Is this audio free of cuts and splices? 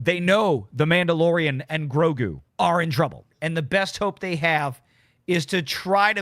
no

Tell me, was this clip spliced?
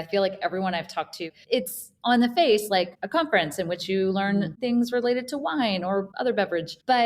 yes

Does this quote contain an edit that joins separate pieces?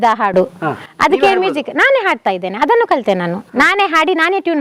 no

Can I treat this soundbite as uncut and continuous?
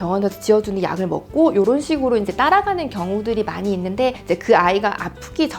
no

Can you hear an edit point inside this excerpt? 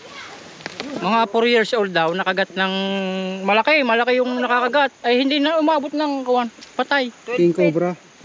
yes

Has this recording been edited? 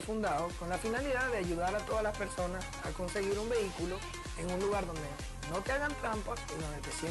no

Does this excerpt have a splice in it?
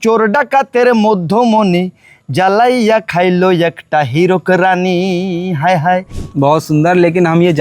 yes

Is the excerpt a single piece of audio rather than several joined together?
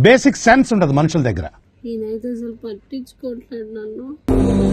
no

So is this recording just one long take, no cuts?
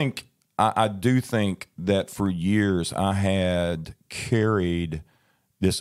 yes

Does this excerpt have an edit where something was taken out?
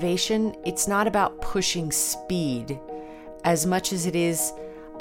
no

